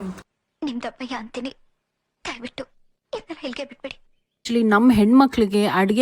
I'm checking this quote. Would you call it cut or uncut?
cut